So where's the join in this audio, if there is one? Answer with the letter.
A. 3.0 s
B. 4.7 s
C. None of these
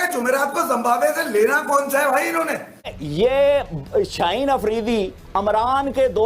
A